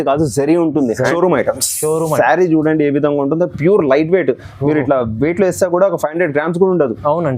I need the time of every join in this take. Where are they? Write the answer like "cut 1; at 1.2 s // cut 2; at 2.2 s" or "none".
cut 1; at 1.1 s